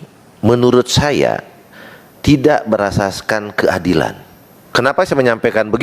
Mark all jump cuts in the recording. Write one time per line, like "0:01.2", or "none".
0:04.6